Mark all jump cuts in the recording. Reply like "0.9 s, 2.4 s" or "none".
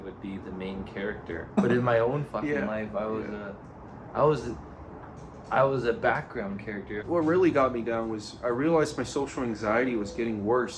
1.6 s, 7.0 s